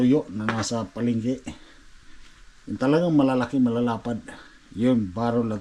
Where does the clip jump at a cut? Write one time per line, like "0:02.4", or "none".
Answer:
none